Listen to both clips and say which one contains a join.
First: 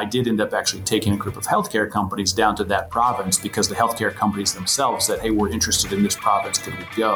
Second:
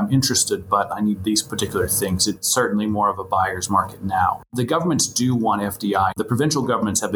second; 2 cuts; at 4.5 s, 6.1 s

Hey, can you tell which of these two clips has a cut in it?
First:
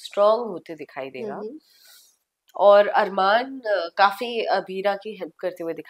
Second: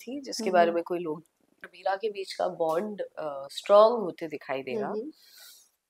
second; 1 cut; at 1.7 s

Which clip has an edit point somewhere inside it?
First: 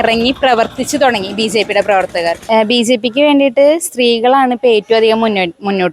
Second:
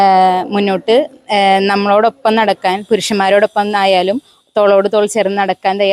first; 1 cut; at 2.4 s

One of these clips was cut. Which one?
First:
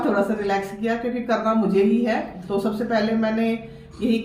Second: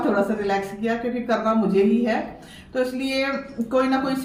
first; 1 cut; at 2.4 s

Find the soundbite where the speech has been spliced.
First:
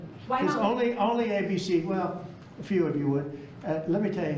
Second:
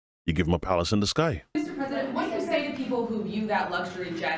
second; 1 cut; at 1.5 s

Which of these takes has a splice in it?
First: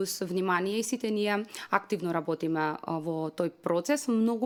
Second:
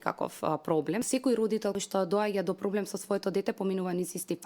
second; 2 cuts; at 1.1 s, 1.8 s

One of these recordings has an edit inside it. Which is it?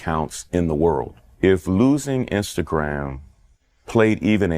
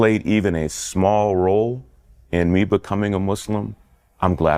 first; 1 cut; at 1.2 s

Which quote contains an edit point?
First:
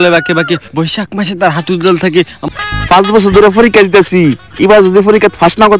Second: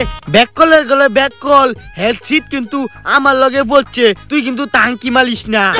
first; 1 cut; at 2.4 s

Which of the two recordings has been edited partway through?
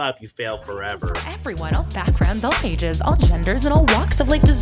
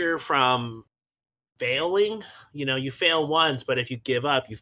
first; 1 cut; at 1.5 s

